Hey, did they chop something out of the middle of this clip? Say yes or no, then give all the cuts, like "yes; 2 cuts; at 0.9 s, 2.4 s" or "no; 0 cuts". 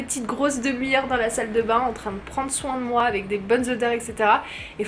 no; 0 cuts